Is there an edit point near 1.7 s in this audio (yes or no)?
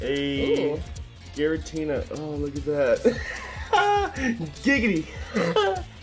no